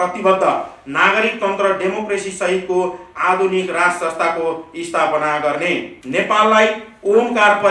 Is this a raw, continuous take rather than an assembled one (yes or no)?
no